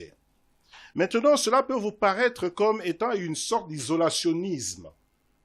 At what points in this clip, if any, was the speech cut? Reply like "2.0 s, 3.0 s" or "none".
none